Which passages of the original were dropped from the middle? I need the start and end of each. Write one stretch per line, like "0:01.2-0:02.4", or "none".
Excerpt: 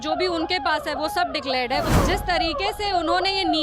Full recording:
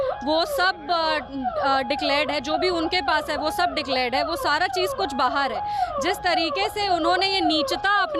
0:04.4-0:05.9